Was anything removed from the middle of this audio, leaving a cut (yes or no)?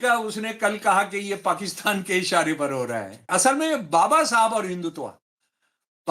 yes